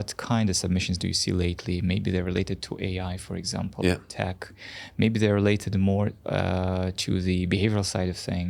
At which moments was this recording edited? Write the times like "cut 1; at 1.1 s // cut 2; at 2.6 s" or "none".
none